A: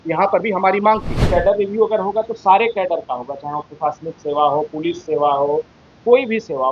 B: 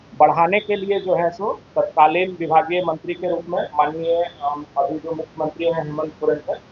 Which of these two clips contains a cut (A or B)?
A